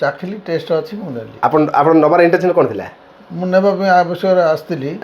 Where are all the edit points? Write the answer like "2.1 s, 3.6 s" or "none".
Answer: none